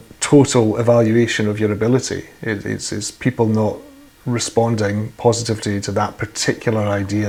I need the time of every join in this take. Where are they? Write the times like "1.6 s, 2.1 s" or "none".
none